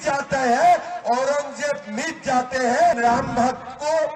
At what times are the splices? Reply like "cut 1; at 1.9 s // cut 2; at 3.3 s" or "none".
cut 1; at 3.0 s